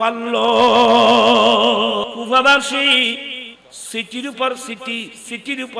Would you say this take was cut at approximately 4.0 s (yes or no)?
no